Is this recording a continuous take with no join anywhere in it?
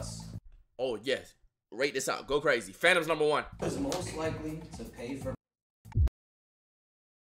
no; 1 cut; at 3.6 s

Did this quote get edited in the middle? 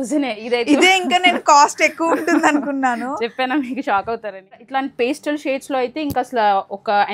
yes; 1 cut; at 4.6 s

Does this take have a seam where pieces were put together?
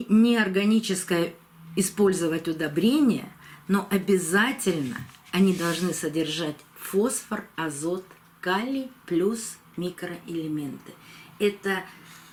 no; 0 cuts

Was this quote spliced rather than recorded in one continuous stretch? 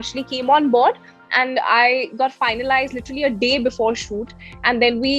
no; 0 cuts

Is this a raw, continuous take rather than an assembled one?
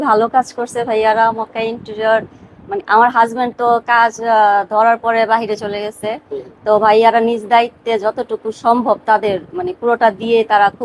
yes; 0 cuts

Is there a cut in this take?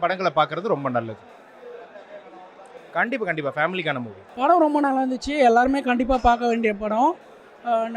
no; 0 cuts

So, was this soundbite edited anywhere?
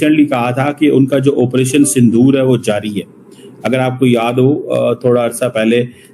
no; 0 cuts

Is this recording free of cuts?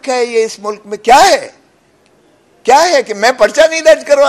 yes; 0 cuts

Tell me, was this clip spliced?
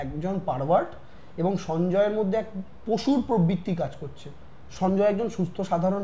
no; 0 cuts

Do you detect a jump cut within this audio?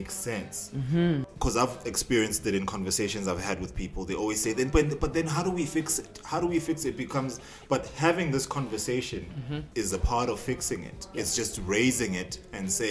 yes; 2 cuts; at 1.3 s, 9.6 s

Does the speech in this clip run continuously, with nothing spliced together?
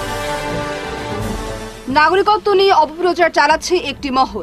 no; 1 cut; at 1.4 s

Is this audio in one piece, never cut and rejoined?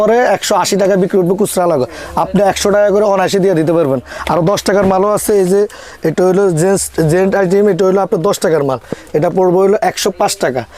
yes; 0 cuts

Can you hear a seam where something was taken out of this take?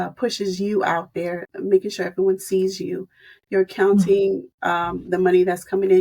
yes; 1 cut; at 1.5 s

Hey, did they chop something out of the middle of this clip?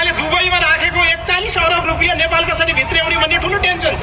no; 0 cuts

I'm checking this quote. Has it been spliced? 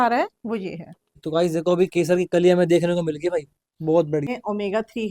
yes; 2 cuts; at 1.2 s, 4.3 s

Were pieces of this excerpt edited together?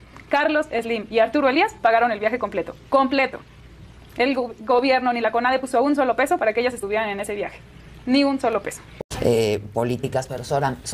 yes; 1 cut; at 9.3 s

